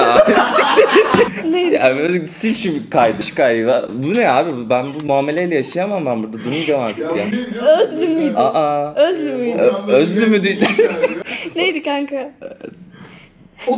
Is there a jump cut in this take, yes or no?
yes